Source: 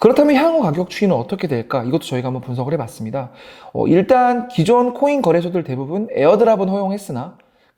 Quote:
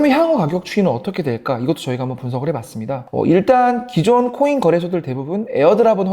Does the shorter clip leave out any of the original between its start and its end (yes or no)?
yes